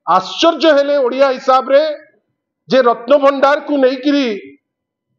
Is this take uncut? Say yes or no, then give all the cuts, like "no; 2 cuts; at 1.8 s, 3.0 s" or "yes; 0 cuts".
yes; 0 cuts